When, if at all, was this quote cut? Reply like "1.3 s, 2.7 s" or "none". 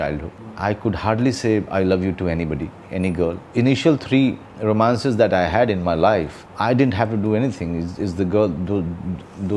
none